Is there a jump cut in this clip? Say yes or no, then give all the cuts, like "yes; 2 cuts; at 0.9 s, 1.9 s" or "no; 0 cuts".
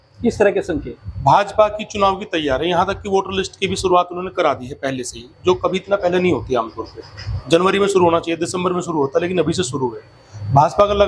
no; 0 cuts